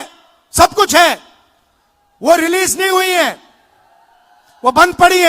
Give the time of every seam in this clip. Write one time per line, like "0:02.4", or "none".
none

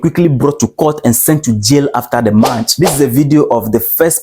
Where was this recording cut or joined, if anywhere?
0:02.6

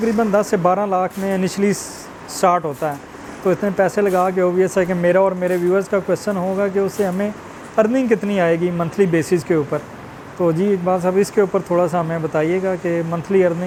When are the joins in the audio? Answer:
none

